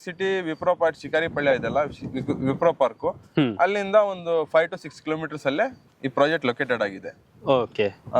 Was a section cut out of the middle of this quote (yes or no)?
no